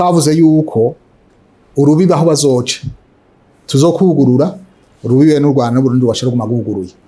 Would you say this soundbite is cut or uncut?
uncut